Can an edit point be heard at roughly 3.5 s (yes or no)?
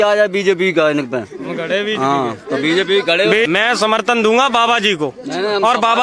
yes